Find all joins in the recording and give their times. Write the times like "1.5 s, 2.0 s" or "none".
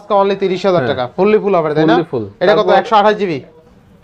none